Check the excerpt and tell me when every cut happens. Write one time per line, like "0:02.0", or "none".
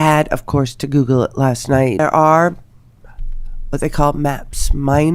0:02.0